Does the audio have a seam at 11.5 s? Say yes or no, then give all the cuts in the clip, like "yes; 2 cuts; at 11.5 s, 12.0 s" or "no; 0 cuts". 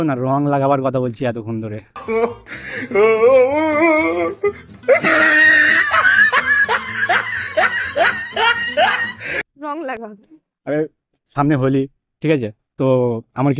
no; 0 cuts